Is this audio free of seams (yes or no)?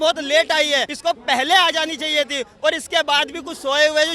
no